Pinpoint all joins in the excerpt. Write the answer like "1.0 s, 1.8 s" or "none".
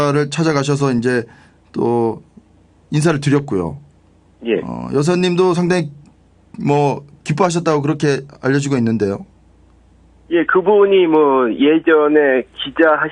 9.9 s

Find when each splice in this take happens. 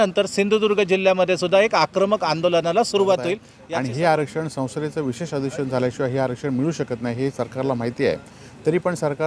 3.5 s

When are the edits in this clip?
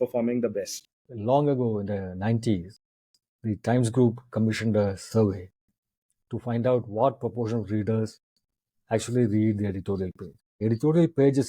1.0 s, 10.6 s

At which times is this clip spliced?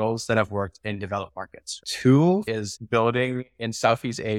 1.8 s, 2.5 s

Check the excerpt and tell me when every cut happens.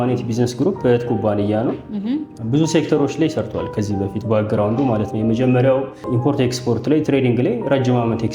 6.0 s

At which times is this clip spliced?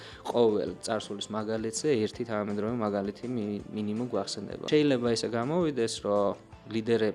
4.6 s

